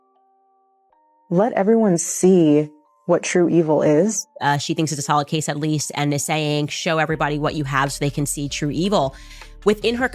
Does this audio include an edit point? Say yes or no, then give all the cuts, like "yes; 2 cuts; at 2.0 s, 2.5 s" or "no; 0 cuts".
yes; 1 cut; at 4.3 s